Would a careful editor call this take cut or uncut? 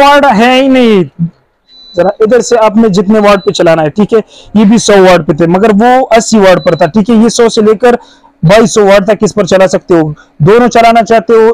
cut